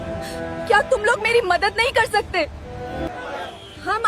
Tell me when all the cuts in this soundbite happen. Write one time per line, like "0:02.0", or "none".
0:03.1